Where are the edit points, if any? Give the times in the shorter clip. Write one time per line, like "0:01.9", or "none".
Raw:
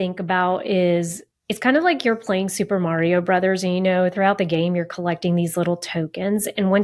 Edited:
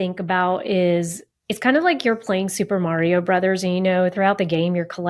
none